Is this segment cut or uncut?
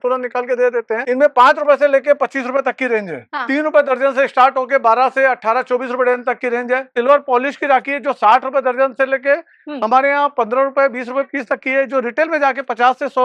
cut